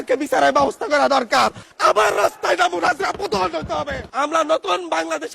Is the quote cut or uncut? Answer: cut